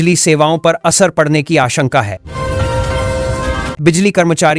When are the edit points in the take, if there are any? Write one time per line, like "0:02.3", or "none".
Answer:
0:02.2
0:03.8